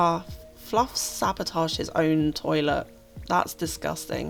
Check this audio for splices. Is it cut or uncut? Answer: uncut